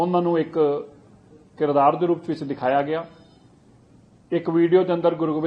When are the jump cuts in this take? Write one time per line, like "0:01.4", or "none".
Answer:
none